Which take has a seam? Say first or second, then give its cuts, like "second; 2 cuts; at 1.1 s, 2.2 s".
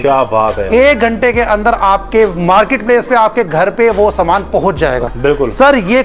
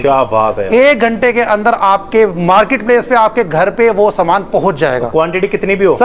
first; 1 cut; at 5.1 s